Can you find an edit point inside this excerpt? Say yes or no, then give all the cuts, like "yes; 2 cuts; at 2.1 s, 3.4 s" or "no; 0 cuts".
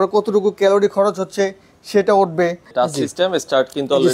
yes; 1 cut; at 2.7 s